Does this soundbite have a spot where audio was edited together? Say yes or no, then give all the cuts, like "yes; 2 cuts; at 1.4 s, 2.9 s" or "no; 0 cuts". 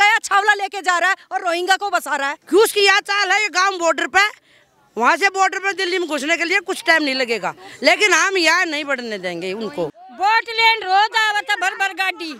yes; 2 cuts; at 2.3 s, 10.0 s